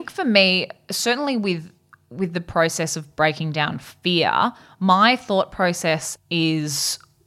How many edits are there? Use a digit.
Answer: 1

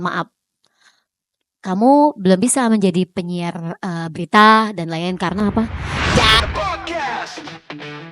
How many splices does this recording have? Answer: 1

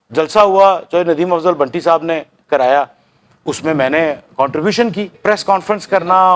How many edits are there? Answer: 1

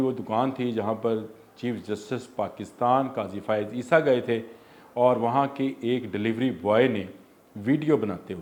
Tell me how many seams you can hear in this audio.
0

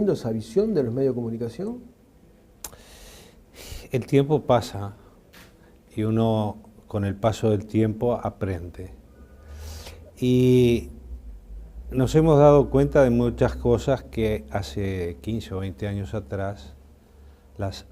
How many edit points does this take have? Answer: 1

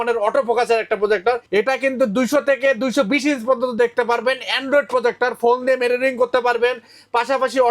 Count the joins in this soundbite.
1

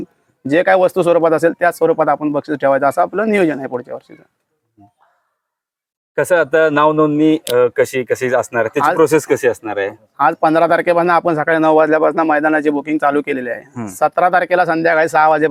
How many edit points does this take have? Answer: 0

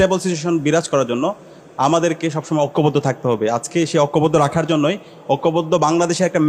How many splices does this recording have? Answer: 0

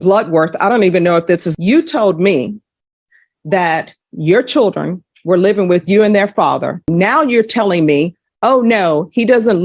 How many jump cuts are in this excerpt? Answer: 2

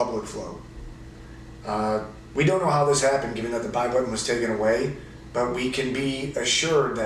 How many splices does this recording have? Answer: 1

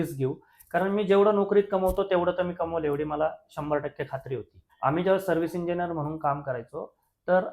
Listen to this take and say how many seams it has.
1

